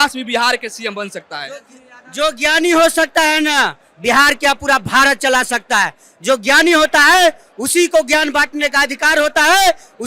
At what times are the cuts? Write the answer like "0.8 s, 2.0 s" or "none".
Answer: none